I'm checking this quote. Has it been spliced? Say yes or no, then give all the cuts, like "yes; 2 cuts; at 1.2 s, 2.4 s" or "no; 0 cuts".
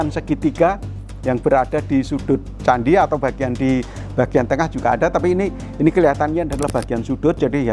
no; 0 cuts